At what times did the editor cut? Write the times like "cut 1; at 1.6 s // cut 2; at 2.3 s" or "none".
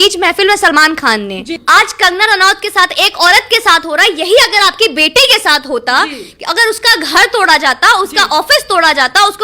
cut 1; at 1.5 s